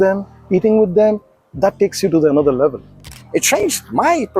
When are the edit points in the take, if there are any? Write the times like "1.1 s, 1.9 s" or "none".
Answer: 3.1 s

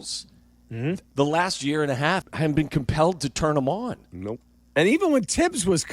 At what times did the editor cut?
1.1 s, 2.2 s

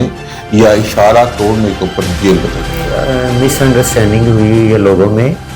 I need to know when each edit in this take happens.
2.9 s

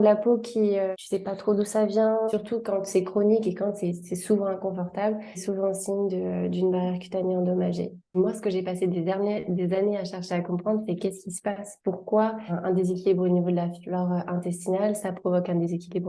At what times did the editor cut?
0.9 s, 2.3 s, 5.4 s, 8.2 s, 12.5 s

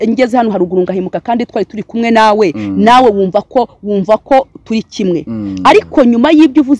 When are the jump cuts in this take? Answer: none

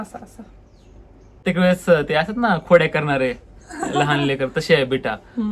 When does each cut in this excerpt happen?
1.4 s

